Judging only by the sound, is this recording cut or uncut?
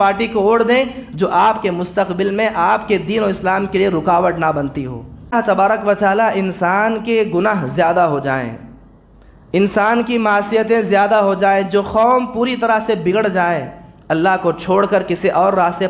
cut